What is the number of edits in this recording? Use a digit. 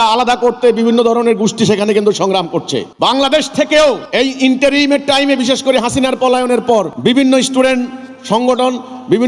3